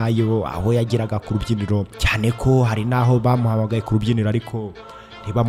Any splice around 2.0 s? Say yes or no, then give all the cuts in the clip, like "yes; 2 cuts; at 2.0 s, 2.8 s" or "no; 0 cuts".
yes; 1 cut; at 2.0 s